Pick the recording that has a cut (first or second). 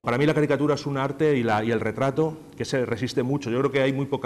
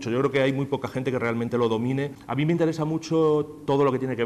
second